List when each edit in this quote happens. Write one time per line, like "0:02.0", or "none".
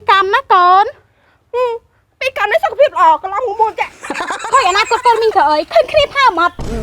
0:04.4